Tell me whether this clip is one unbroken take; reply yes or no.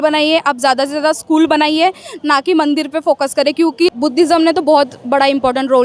no